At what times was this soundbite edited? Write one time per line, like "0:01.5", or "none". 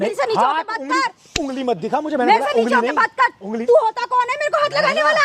none